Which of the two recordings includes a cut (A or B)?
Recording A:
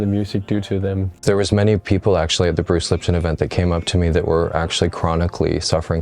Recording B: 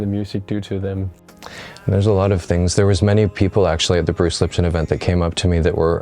A